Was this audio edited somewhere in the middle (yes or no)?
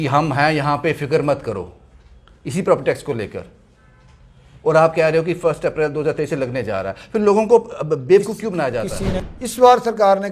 yes